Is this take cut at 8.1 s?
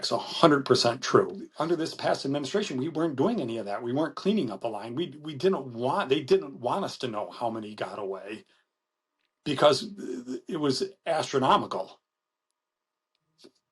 no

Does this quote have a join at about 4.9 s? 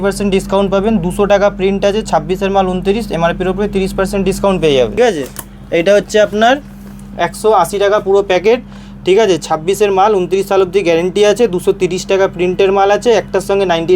yes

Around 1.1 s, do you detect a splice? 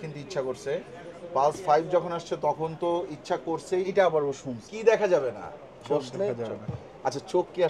no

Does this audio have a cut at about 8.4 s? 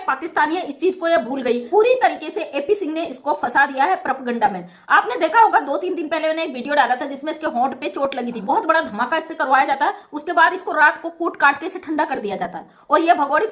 yes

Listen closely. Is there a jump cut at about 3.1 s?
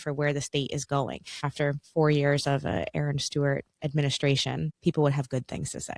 no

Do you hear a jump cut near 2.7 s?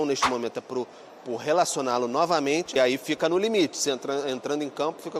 yes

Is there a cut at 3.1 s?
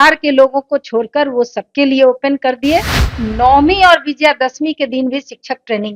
yes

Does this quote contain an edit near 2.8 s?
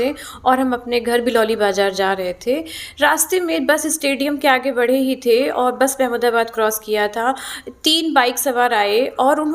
no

